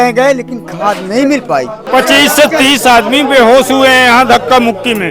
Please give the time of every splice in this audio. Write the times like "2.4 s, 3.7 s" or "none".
1.8 s